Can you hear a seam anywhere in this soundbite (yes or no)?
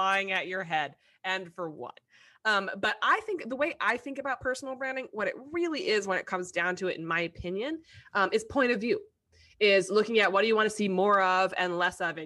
no